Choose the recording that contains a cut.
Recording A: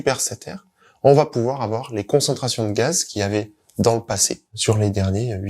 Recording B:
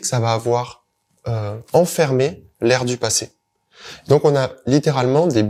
A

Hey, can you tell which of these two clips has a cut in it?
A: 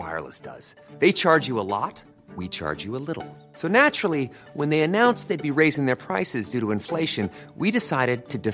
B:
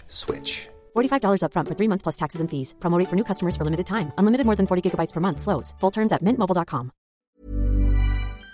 B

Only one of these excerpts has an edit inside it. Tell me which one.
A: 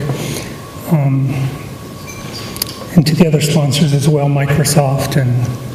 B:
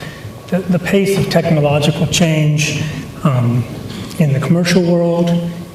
B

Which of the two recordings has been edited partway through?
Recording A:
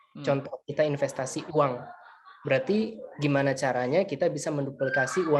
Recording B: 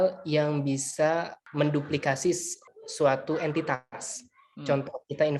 B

